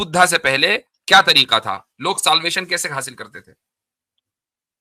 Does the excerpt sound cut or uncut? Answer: uncut